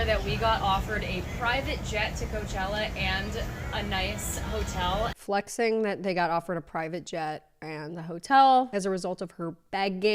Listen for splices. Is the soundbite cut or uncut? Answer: cut